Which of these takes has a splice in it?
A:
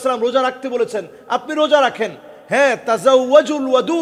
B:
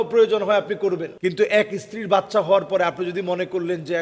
B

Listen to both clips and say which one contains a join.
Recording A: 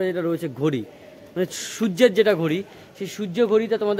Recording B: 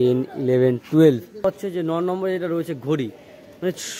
B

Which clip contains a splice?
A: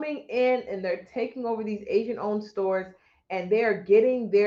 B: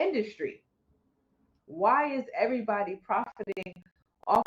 B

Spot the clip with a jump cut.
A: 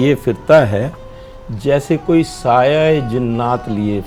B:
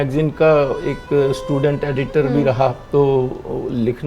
B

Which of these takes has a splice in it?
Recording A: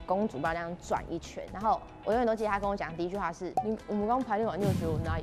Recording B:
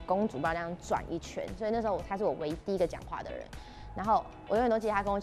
A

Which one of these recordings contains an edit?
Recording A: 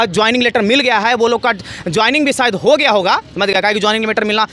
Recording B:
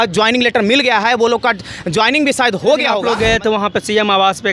B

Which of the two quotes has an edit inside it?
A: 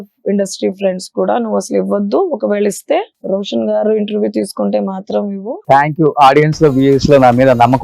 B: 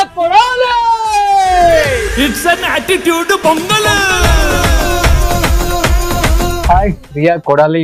A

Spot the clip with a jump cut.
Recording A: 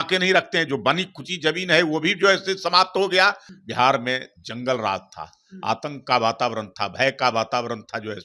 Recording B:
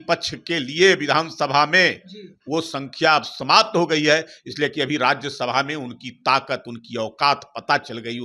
A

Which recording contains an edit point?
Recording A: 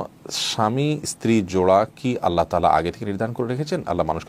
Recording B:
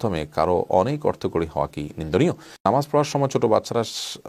B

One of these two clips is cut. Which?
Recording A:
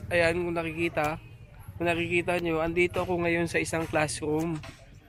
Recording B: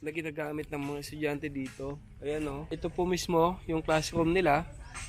B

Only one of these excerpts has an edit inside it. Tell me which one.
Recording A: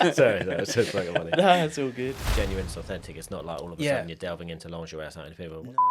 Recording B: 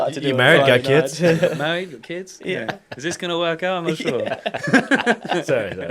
A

